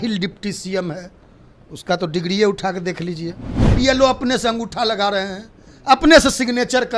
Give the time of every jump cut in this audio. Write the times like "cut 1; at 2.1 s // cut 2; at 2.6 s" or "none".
cut 1; at 3.7 s

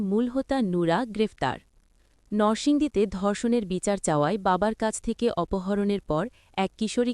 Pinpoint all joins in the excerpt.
none

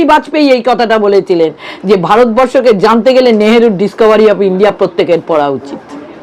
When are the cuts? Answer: none

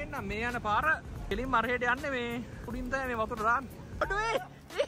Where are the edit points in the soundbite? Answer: cut 1; at 1.2 s // cut 2; at 2.7 s // cut 3; at 4.0 s

